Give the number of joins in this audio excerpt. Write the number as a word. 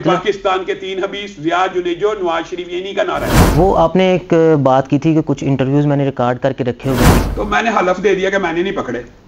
two